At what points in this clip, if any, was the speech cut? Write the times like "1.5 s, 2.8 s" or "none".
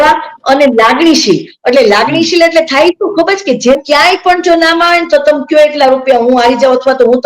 3.8 s